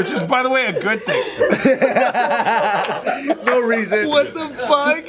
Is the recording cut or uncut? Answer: cut